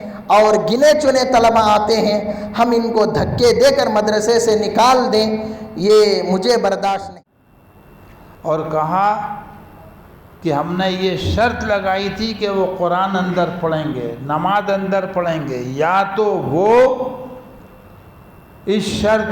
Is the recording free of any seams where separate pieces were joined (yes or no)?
no